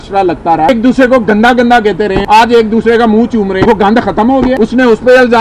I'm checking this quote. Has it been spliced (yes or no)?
yes